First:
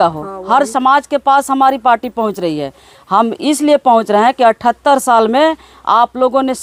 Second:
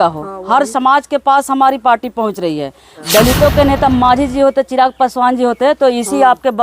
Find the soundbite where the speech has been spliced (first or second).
second